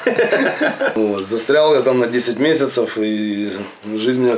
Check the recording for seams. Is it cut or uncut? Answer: cut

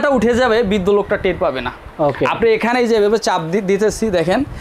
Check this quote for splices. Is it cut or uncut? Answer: uncut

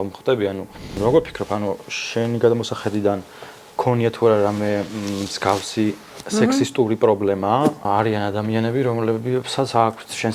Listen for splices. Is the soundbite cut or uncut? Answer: cut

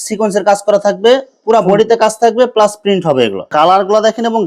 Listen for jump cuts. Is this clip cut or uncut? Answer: cut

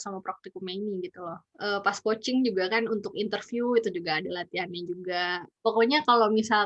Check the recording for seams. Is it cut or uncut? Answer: cut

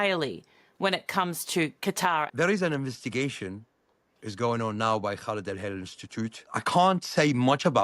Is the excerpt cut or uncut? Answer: cut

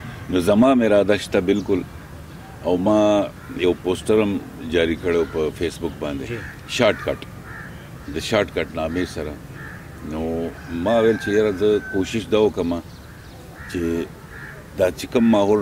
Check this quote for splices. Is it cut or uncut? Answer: uncut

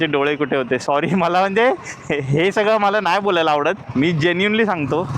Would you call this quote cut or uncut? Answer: cut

